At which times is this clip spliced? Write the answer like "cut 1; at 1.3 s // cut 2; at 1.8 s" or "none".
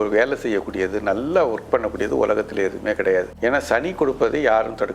cut 1; at 3.3 s